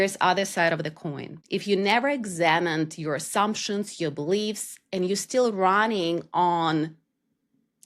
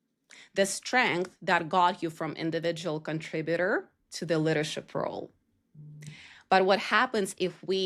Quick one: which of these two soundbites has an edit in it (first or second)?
first